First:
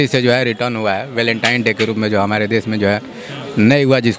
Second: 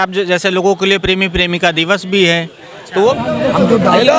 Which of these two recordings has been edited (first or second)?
second